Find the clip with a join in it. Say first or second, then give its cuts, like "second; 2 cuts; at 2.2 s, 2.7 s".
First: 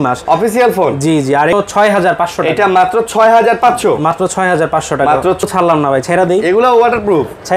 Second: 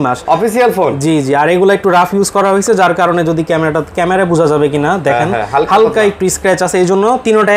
first; 2 cuts; at 1.5 s, 5.5 s